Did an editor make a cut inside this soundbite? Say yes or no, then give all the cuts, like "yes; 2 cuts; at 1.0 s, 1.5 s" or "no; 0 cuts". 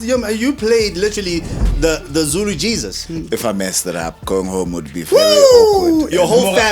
yes; 1 cut; at 2.9 s